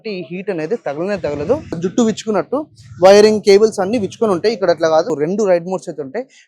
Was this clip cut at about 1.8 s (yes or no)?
yes